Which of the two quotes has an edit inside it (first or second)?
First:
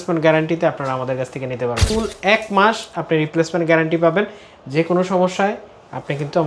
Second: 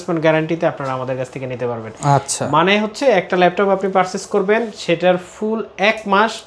first